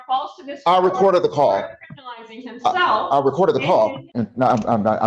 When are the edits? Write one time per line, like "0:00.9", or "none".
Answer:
0:04.0